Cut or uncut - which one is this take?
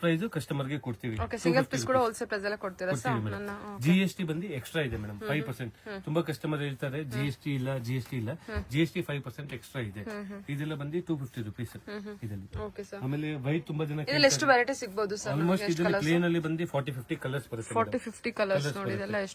uncut